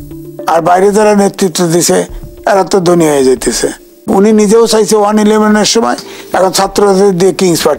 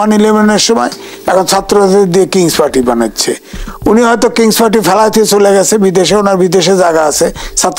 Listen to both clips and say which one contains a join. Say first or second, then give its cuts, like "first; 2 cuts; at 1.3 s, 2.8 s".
first; 1 cut; at 4.0 s